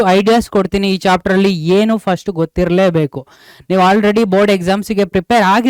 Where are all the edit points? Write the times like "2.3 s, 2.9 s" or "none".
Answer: none